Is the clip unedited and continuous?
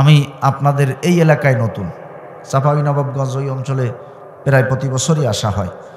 yes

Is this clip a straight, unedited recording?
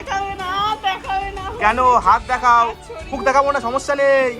no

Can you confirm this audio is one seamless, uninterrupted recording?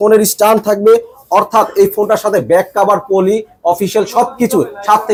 yes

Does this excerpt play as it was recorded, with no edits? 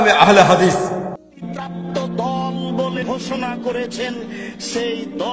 no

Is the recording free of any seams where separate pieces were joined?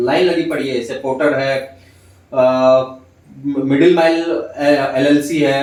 yes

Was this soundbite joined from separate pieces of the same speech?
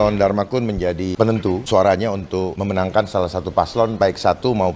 yes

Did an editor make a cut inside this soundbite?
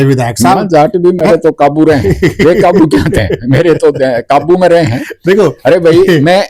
no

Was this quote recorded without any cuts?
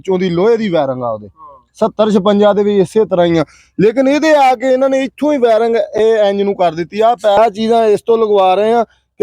no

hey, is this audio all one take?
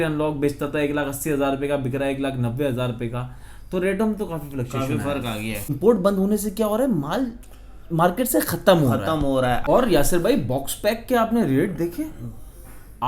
no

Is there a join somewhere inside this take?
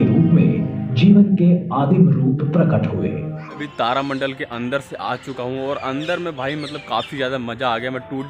yes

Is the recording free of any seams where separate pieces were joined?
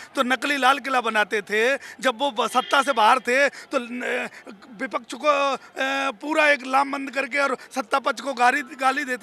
yes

